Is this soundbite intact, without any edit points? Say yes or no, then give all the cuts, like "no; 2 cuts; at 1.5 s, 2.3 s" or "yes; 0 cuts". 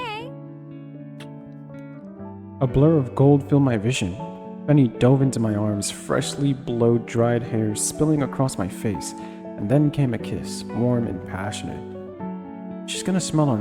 yes; 0 cuts